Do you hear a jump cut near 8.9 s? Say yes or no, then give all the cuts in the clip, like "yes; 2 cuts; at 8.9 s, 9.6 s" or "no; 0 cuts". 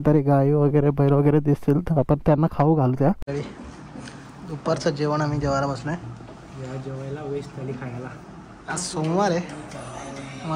no; 1 cut; at 3.2 s